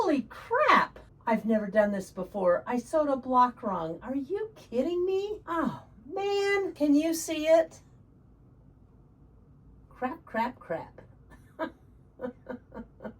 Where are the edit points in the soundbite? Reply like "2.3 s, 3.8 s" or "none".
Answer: 1.1 s, 5.4 s, 6.7 s, 9.9 s